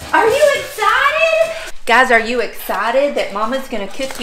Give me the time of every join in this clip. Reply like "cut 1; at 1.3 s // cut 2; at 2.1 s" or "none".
cut 1; at 1.6 s